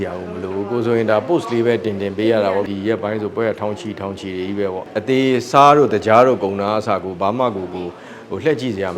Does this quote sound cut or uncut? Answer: cut